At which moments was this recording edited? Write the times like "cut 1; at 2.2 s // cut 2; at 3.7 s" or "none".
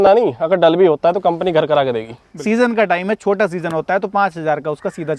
cut 1; at 2.3 s